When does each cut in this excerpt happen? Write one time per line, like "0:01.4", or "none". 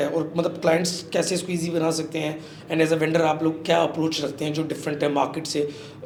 none